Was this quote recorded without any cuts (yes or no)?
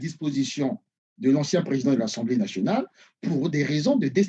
yes